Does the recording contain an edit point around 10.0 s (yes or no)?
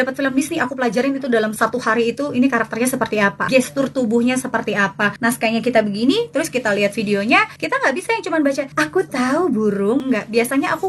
yes